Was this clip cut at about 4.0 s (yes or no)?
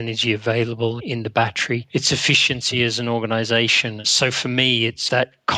yes